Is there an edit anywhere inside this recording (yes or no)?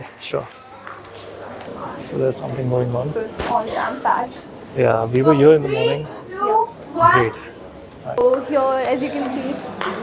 yes